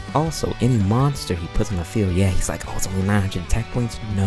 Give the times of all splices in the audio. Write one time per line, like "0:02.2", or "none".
none